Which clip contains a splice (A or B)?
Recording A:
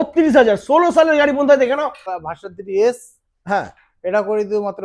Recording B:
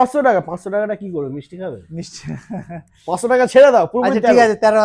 A